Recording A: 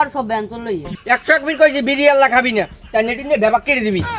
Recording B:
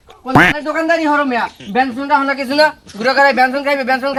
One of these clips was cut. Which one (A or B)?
A